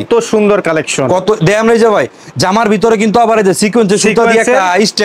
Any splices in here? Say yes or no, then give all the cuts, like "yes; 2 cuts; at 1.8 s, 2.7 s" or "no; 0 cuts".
no; 0 cuts